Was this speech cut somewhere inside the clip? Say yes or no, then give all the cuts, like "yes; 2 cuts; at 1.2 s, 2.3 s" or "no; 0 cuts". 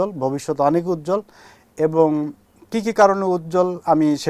no; 0 cuts